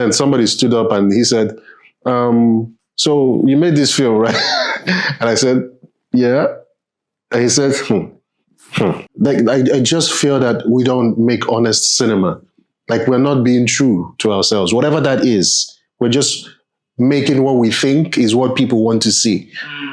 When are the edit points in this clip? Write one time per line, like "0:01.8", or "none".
0:09.1